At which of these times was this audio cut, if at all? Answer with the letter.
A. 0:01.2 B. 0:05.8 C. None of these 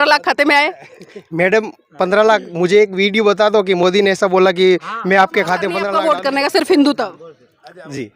B